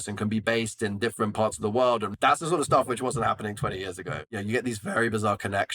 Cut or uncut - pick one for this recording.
cut